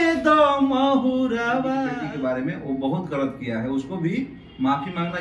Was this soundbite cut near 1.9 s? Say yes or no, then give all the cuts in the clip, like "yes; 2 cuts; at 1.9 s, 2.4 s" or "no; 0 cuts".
yes; 1 cut; at 1.9 s